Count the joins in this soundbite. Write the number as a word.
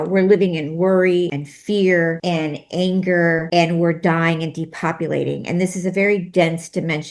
three